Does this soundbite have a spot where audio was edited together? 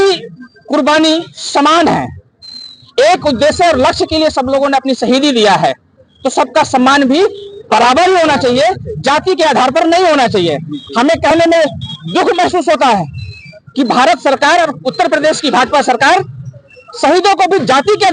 no; 0 cuts

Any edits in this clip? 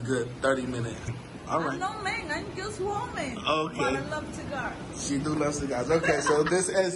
yes; 1 cut; at 1.1 s

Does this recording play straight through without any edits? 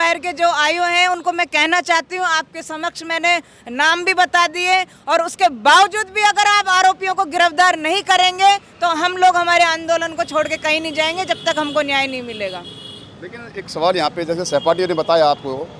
yes; 0 cuts

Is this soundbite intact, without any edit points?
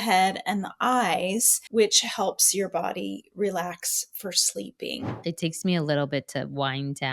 no; 2 cuts; at 1.6 s, 5.2 s

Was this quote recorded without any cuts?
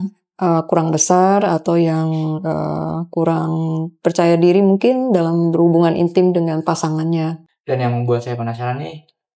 no; 1 cut; at 7.5 s

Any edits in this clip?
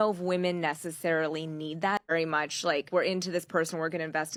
no; 0 cuts

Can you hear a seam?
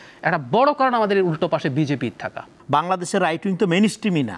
yes; 1 cut; at 2.5 s

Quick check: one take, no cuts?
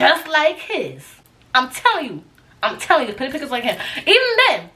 yes; 0 cuts

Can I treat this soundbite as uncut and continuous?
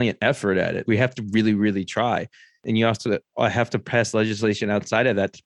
no; 2 cuts; at 0.8 s, 2.5 s

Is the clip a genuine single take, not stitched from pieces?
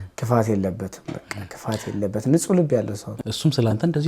no; 1 cut; at 3.1 s

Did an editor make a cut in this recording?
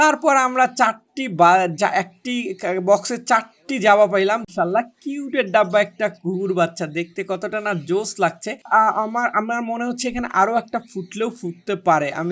yes; 2 cuts; at 4.5 s, 8.7 s

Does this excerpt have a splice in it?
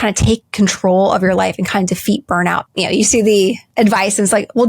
yes; 2 cuts; at 2.6 s, 3.6 s

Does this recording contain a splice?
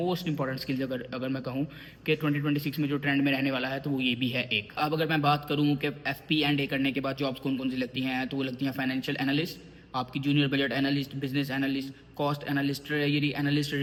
no; 0 cuts

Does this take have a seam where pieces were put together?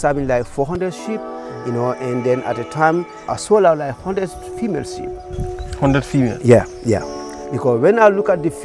yes; 1 cut; at 3.3 s

